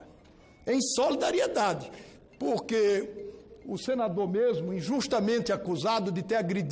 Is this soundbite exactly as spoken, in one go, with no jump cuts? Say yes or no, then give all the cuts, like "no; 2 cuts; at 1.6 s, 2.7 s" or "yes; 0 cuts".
yes; 0 cuts